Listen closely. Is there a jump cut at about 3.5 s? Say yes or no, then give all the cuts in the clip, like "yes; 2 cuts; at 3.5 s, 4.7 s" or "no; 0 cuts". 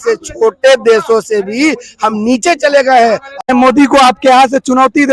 yes; 1 cut; at 3.5 s